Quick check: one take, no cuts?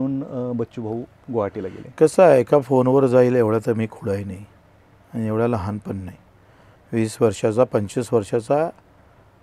yes; 0 cuts

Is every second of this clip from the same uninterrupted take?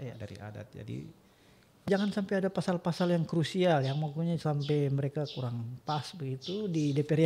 no; 1 cut; at 1.9 s

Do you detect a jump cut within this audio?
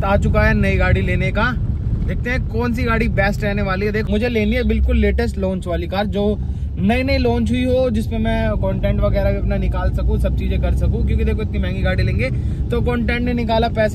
no; 0 cuts

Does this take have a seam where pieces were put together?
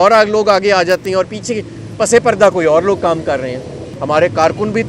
yes; 1 cut; at 3.9 s

